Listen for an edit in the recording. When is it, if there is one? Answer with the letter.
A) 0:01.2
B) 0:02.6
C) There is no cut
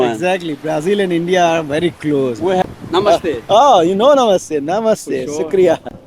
B